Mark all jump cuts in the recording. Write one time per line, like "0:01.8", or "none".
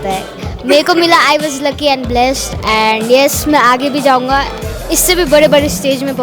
0:02.5